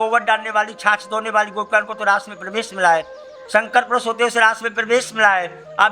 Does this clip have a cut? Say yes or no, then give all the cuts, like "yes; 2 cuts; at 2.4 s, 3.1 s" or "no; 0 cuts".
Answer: no; 0 cuts